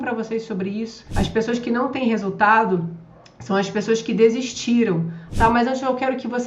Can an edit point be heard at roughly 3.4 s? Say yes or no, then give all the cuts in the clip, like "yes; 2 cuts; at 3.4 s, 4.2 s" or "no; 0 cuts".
no; 2 cuts; at 1.0 s, 5.2 s